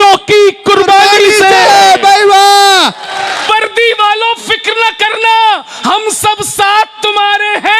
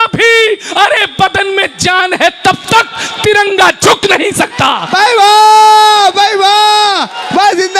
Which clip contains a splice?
first; 1 cut; at 3.5 s

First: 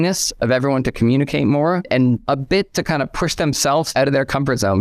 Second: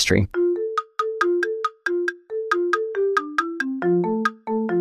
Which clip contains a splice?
first; 2 cuts; at 1.9 s, 3.9 s

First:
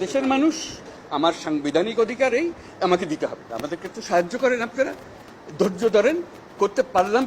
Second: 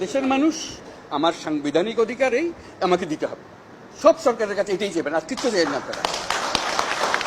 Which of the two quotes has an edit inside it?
first; 1 cut; at 3.5 s

